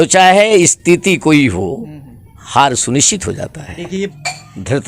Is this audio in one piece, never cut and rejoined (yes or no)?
no